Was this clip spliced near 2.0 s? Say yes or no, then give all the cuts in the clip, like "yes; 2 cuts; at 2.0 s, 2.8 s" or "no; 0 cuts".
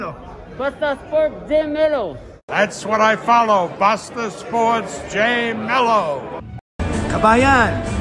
no; 0 cuts